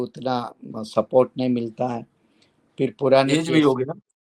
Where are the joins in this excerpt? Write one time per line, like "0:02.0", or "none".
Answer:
none